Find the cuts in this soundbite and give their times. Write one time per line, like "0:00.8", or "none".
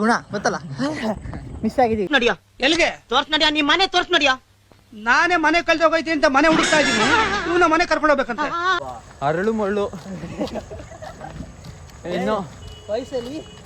0:02.1
0:08.8